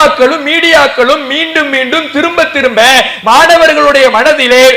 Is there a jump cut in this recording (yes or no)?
no